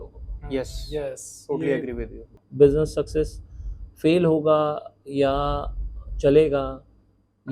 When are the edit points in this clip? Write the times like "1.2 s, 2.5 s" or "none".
2.3 s